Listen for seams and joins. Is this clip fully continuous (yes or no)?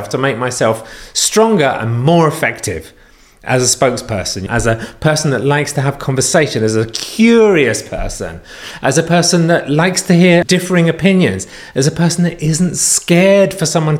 no